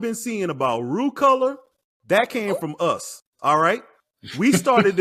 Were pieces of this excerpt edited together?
no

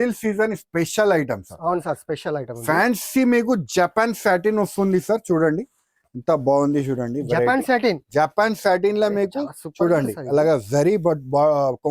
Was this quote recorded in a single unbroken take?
yes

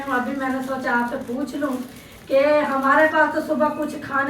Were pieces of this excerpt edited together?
no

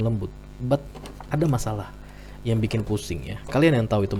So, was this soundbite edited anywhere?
no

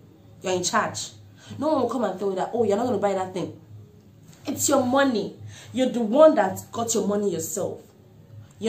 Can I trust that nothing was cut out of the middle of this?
yes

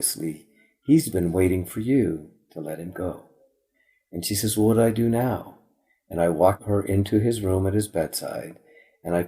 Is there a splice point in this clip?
yes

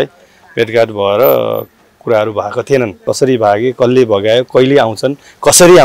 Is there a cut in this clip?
yes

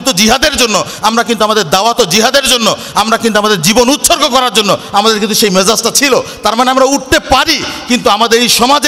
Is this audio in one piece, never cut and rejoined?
yes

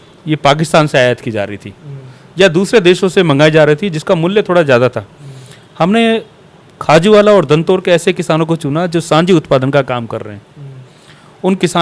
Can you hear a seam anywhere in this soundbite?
no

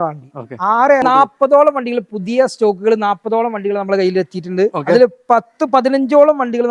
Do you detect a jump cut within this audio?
yes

